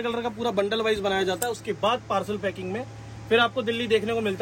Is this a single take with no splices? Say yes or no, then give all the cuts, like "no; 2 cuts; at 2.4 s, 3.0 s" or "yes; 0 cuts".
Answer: yes; 0 cuts